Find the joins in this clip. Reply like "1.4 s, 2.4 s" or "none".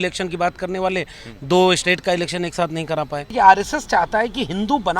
3.3 s

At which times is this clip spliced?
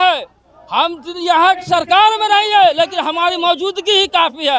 none

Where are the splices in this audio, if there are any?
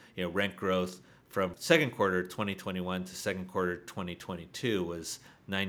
1.6 s

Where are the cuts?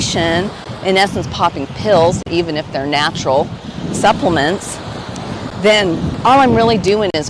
none

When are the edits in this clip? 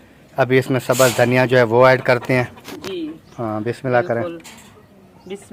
none

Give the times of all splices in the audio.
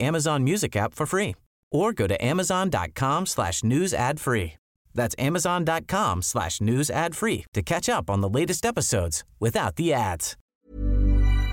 10.3 s

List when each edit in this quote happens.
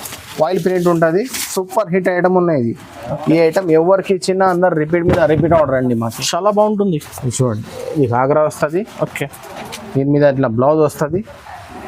none

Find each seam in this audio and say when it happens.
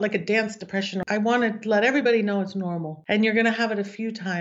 1.0 s, 2.9 s

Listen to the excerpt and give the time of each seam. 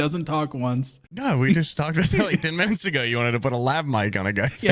1.0 s

